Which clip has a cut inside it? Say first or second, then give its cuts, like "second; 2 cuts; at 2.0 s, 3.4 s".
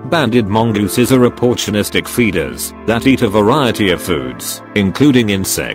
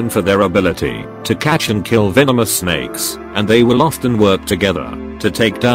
first; 2 cuts; at 0.9 s, 3.0 s